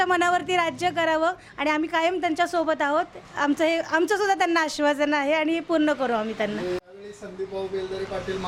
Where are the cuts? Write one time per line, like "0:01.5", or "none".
none

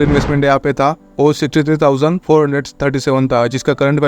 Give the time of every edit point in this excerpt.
0:01.0
0:02.2

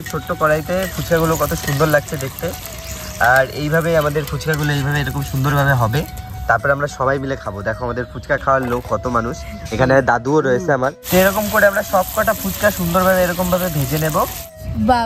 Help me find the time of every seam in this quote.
none

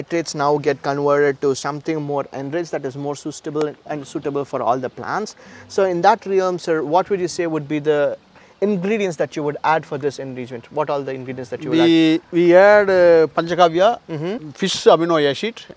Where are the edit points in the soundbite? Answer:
none

